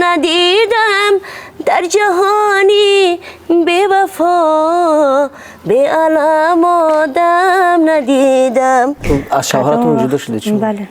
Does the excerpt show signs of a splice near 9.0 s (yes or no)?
yes